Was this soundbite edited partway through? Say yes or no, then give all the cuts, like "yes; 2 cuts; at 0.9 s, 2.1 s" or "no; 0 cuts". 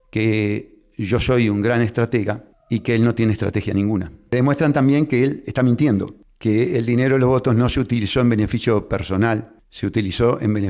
no; 0 cuts